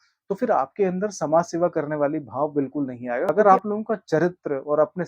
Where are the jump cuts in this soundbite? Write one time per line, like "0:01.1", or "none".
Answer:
0:03.3